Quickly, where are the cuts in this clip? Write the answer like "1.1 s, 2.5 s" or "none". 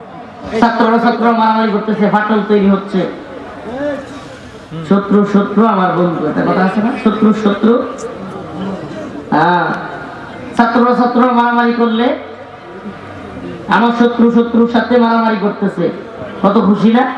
none

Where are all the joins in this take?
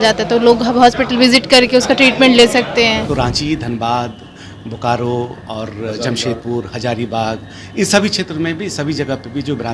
3.1 s

